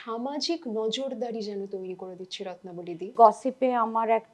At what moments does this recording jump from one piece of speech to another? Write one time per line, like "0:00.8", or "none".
0:03.1

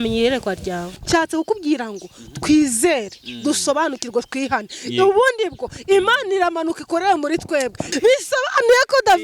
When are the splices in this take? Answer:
0:01.0
0:07.8

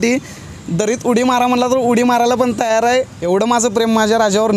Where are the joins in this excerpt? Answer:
0:03.2

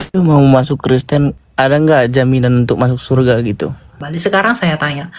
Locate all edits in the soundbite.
0:01.4
0:04.0

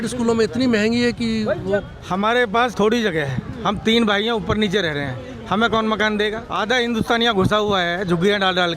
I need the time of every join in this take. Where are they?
0:02.0
0:02.7
0:06.4

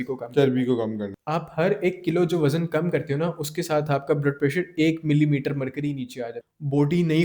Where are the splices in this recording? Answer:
0:01.1
0:06.3

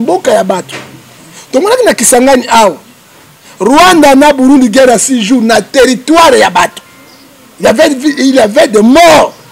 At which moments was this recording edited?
none

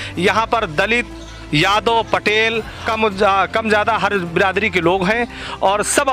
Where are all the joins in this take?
0:02.9

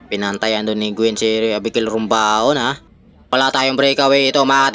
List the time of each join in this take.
0:03.3

